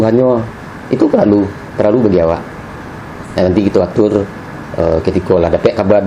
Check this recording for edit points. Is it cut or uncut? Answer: uncut